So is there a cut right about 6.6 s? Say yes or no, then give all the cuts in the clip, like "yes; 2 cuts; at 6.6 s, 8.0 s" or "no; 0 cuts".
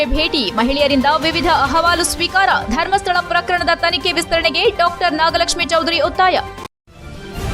yes; 1 cut; at 6.6 s